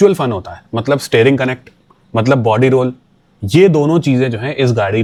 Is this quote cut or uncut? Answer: uncut